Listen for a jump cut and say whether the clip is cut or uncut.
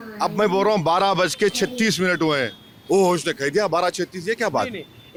uncut